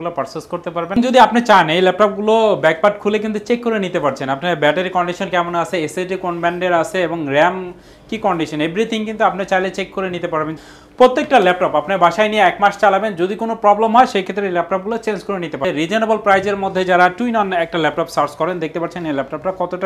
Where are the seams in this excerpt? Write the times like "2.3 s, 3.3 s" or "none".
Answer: 0.9 s, 10.5 s, 15.6 s